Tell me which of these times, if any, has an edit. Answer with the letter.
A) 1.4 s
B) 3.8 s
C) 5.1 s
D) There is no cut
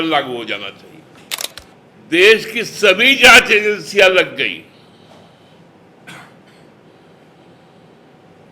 A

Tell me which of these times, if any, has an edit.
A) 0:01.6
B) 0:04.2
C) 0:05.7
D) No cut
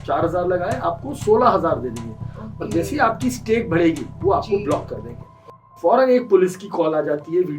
C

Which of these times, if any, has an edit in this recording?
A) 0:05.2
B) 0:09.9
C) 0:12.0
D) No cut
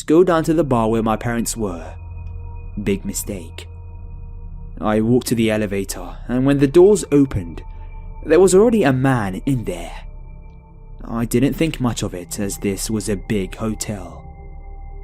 A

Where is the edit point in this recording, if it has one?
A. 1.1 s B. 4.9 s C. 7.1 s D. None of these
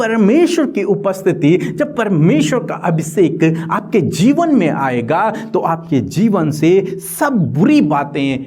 D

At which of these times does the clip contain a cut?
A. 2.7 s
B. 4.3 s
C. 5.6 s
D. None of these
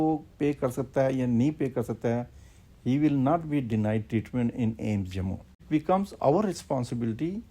C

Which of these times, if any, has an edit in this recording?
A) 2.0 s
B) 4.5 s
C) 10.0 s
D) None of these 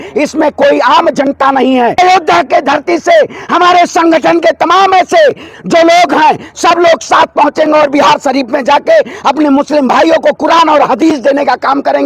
A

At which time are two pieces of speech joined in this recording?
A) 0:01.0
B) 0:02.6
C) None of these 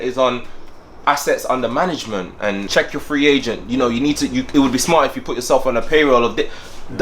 B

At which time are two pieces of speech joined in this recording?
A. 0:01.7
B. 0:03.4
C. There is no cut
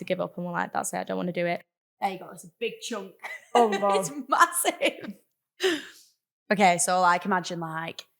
A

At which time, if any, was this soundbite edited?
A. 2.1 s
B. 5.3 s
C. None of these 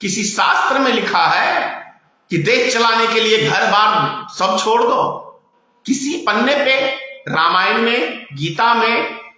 C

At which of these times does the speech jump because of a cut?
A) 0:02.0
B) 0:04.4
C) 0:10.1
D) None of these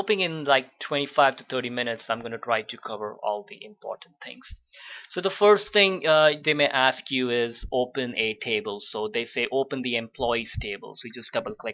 C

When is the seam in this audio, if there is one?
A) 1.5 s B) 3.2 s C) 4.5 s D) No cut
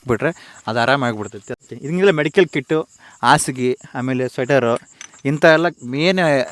A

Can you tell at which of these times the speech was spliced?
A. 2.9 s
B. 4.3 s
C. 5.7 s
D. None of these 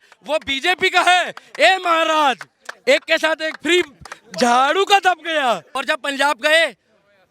C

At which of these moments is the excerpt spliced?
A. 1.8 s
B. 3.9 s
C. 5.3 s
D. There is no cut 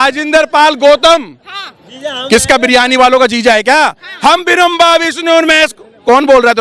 D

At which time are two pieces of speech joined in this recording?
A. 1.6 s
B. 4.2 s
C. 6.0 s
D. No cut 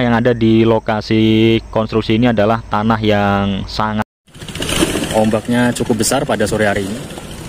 B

